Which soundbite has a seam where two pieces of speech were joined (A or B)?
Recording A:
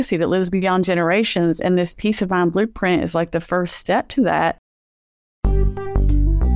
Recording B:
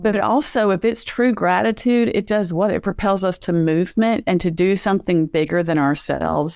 A